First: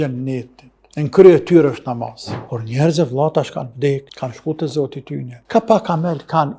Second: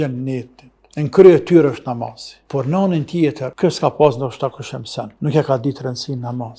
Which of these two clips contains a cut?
first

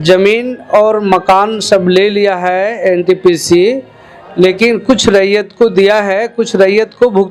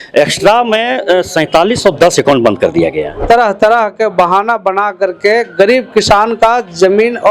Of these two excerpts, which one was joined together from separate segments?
second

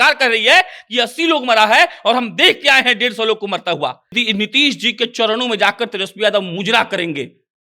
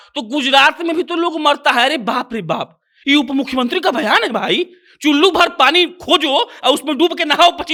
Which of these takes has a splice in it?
first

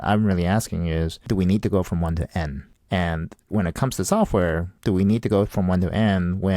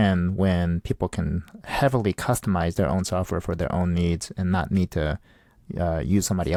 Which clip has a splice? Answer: first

